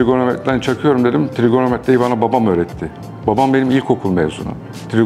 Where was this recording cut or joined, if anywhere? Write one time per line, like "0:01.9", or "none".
none